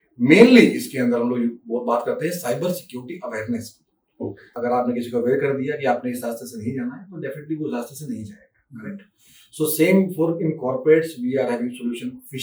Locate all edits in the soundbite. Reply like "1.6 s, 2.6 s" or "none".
4.5 s